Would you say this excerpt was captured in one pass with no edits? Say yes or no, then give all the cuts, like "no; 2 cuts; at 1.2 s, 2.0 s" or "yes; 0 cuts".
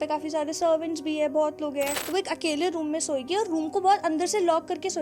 no; 1 cut; at 2.0 s